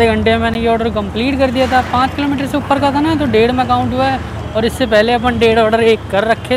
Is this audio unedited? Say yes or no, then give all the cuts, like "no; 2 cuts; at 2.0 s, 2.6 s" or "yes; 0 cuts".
yes; 0 cuts